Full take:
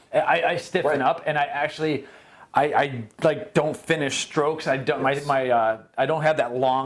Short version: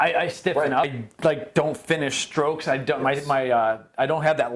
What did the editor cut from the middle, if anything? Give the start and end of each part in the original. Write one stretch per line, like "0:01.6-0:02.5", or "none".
0:01.2-0:02.9